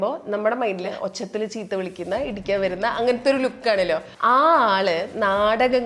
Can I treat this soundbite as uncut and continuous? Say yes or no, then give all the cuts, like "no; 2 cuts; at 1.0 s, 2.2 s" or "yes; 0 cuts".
no; 2 cuts; at 0.9 s, 4.1 s